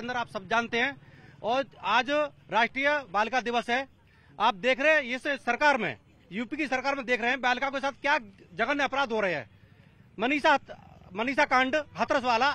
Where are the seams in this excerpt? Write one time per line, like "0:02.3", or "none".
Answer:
none